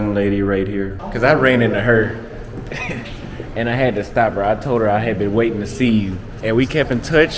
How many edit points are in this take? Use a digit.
2